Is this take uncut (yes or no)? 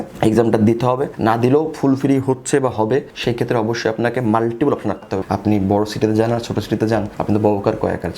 no